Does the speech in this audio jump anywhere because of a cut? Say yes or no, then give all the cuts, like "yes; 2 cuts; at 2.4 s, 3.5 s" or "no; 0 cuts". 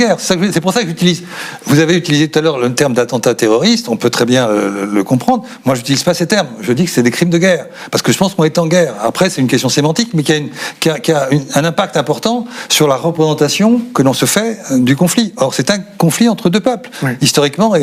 no; 0 cuts